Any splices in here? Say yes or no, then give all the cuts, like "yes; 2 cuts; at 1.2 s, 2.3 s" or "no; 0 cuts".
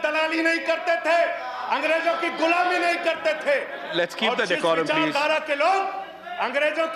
no; 0 cuts